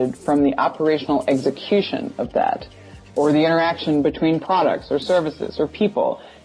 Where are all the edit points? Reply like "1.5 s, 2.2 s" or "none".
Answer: none